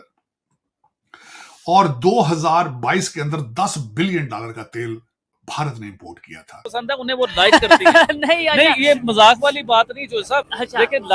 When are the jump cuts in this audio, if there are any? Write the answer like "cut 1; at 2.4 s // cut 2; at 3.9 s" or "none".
cut 1; at 6.7 s

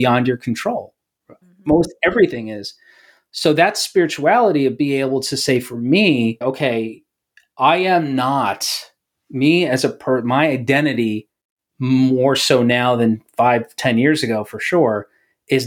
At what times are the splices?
cut 1; at 1.4 s // cut 2; at 6.4 s

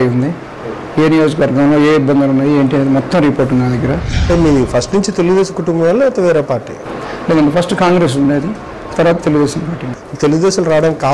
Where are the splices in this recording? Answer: cut 1; at 4.1 s

